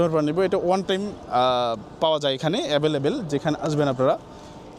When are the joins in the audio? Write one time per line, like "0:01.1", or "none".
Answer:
none